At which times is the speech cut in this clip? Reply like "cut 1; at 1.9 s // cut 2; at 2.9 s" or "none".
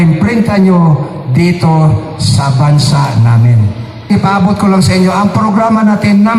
cut 1; at 4.1 s